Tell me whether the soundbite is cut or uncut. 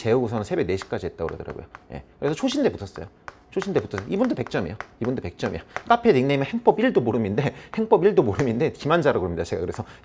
uncut